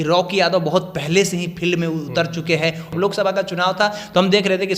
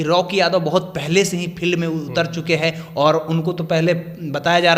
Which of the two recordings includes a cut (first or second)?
first